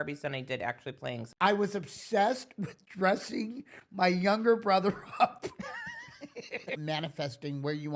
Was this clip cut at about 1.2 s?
yes; 2 cuts; at 1.2 s, 6.8 s

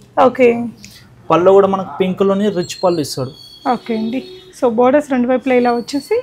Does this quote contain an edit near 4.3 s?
no; 0 cuts

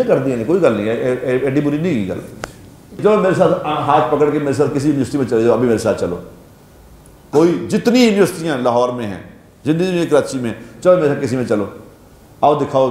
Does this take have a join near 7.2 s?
no; 1 cut; at 3.0 s

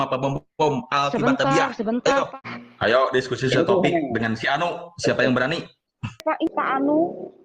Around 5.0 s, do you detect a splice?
no; 2 cuts; at 2.3 s, 6.2 s

